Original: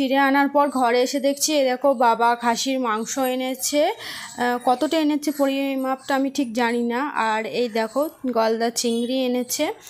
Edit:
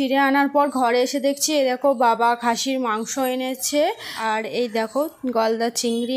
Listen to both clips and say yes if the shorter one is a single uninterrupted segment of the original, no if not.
no